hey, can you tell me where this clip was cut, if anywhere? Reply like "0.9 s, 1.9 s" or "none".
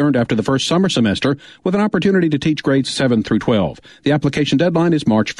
none

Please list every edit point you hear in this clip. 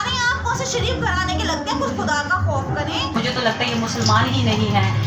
3.1 s

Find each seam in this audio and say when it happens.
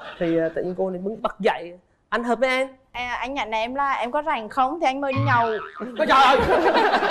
2.9 s

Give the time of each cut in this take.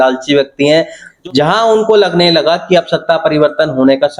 1.1 s

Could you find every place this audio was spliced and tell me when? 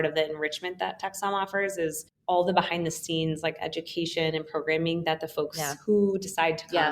none

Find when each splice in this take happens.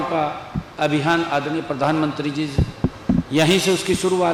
none

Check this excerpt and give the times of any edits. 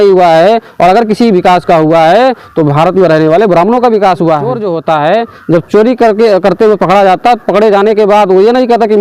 4.6 s

